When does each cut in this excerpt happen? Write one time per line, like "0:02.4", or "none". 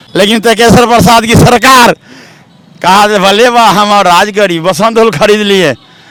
none